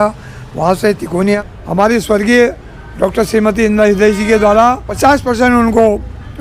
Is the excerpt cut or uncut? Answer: cut